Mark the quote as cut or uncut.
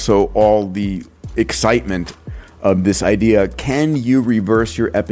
uncut